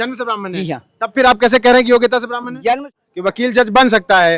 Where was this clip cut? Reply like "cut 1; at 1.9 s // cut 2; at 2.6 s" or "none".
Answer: cut 1; at 2.9 s